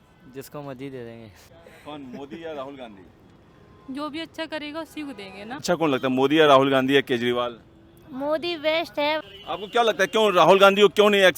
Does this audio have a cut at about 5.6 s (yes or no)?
yes